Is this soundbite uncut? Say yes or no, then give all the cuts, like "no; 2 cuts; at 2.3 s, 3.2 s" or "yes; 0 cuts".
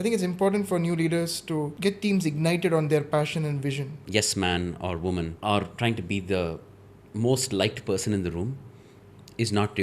no; 1 cut; at 4.0 s